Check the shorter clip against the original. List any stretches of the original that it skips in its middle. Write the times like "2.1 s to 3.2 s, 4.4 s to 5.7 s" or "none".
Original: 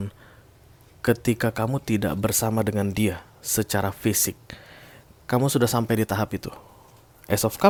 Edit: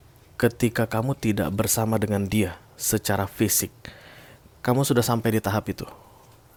none